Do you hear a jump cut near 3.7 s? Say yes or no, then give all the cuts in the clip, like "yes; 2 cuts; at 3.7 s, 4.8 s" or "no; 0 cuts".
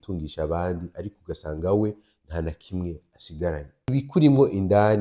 yes; 1 cut; at 3.7 s